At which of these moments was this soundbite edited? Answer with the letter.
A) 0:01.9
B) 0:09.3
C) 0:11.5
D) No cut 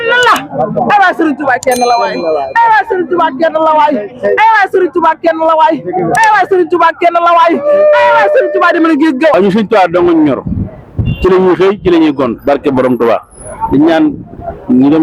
B